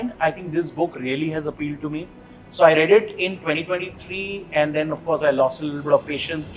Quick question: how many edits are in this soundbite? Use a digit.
0